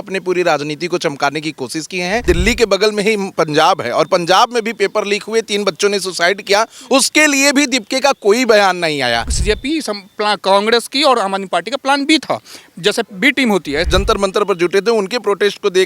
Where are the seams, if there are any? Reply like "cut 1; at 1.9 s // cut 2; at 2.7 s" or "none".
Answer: cut 1; at 2.2 s // cut 2; at 9.3 s // cut 3; at 13.8 s